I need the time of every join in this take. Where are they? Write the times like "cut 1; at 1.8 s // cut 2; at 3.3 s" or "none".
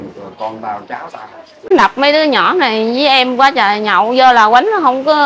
cut 1; at 1.7 s